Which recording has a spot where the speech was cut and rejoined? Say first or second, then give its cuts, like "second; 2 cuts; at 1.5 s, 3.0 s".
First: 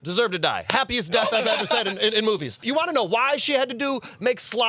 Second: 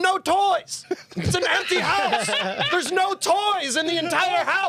first; 1 cut; at 2.6 s